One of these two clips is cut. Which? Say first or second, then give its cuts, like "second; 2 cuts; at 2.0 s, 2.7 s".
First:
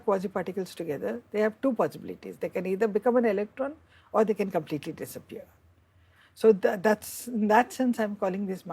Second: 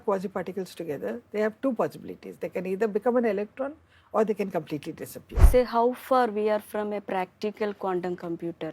second; 1 cut; at 5.5 s